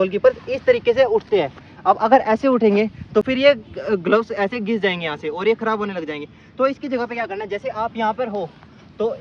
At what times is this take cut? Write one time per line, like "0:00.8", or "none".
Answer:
none